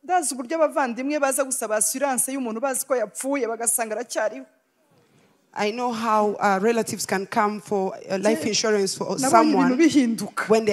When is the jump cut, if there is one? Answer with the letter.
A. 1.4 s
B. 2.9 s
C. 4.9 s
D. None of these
D